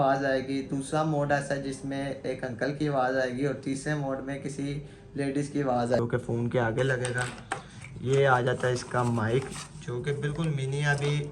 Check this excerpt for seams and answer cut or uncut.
cut